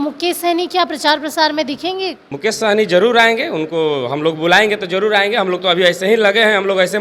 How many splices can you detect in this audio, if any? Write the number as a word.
one